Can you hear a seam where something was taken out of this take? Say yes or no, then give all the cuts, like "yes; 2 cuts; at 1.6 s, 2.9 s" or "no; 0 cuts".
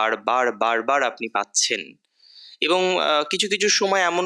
no; 0 cuts